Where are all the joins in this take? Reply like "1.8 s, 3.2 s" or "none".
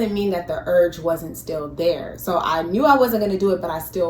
2.1 s